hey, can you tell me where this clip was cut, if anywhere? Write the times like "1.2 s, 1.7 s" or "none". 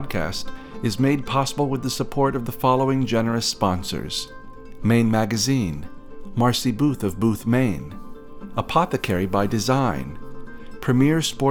none